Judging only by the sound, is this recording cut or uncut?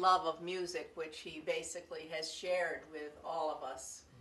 cut